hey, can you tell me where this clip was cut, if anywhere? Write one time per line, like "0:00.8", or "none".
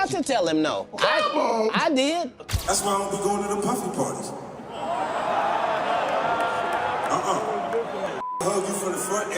0:02.4